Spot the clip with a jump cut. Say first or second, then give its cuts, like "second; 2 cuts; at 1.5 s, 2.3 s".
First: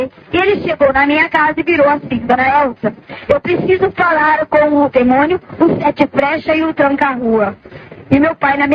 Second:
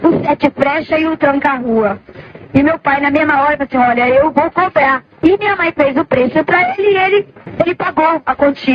second; 2 cuts; at 5.1 s, 7.4 s